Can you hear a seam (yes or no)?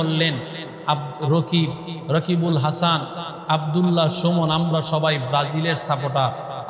no